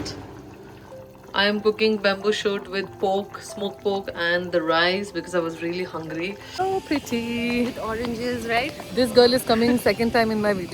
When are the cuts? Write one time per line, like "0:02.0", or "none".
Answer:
0:06.6